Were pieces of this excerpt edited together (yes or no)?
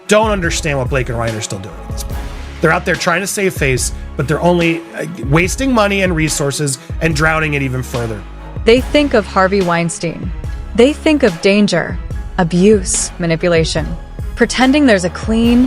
no